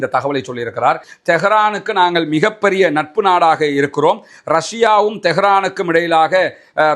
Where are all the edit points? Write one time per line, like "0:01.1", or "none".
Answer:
0:01.1